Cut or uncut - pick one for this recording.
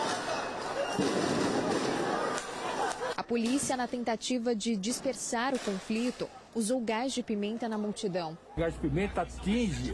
cut